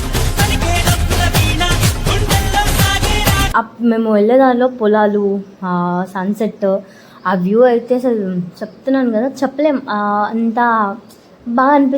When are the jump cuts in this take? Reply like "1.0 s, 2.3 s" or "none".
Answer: 3.5 s